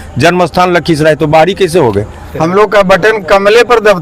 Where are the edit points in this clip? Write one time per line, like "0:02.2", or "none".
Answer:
0:02.4